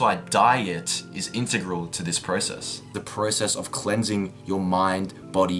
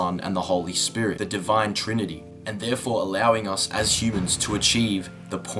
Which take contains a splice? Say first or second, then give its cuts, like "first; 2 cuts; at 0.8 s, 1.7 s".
second; 1 cut; at 1.2 s